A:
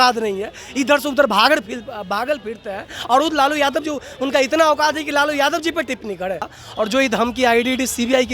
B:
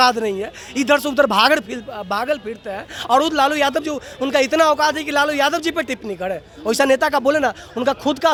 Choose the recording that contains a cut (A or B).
A